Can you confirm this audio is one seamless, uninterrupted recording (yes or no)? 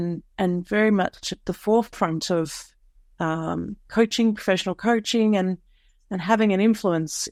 yes